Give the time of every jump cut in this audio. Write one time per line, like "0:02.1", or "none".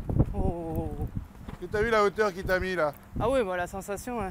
none